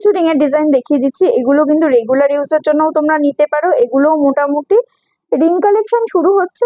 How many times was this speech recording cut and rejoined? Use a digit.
0